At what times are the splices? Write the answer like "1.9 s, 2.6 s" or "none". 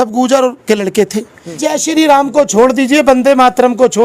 1.5 s